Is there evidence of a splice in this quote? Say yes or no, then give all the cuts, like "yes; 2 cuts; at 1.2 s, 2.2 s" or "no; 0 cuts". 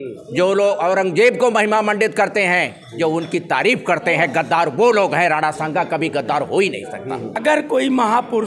yes; 1 cut; at 7.4 s